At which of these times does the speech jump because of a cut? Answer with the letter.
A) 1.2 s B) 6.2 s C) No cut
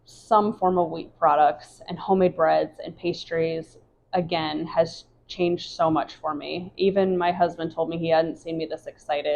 C